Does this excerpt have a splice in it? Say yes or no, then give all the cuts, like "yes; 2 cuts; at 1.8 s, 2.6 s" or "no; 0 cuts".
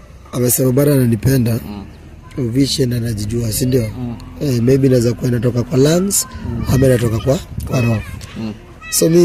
no; 0 cuts